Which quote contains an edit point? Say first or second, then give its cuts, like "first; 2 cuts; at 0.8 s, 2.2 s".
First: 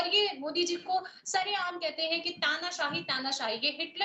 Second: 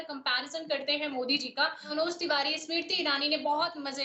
second; 1 cut; at 1.9 s